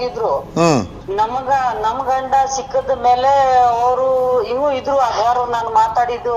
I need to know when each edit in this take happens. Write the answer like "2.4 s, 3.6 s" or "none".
1.0 s